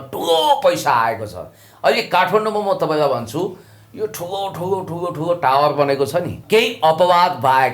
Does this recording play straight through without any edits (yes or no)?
no